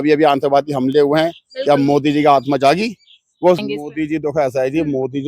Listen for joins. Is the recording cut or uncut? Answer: cut